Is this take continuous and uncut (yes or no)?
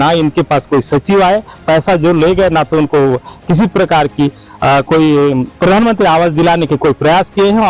yes